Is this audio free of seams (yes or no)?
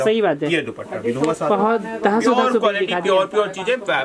yes